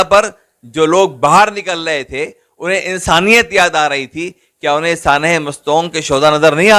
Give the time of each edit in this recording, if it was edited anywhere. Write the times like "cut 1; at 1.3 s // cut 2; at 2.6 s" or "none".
none